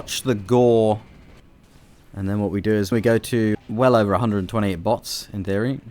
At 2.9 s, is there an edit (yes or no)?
yes